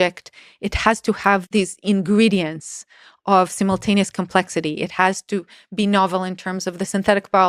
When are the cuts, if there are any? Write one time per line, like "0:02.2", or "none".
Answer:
0:01.4